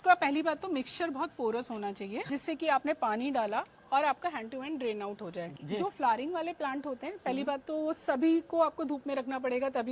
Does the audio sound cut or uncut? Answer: cut